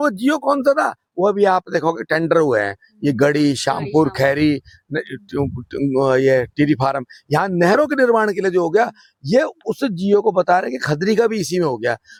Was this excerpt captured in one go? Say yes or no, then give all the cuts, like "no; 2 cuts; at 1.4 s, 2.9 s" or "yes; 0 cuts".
yes; 0 cuts